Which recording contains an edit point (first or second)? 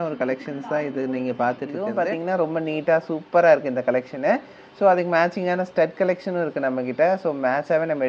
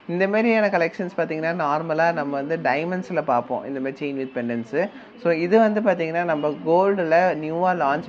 first